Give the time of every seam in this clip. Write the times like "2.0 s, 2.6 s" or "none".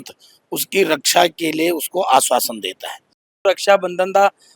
none